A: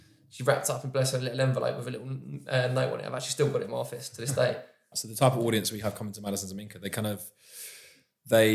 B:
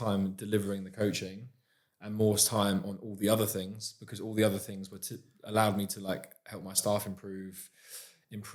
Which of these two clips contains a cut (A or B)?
A